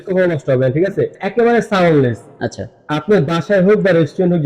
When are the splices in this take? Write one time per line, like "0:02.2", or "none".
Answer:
0:01.2